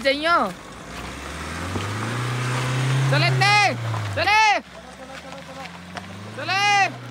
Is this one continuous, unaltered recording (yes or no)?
yes